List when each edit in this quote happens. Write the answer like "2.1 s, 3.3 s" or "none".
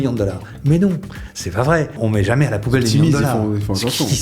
2.0 s